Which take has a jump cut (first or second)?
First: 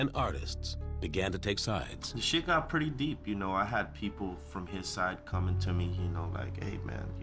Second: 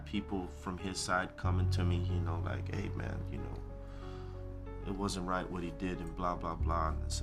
second